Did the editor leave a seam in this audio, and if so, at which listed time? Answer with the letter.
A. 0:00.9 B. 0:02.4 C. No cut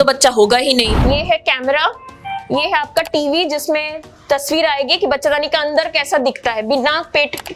A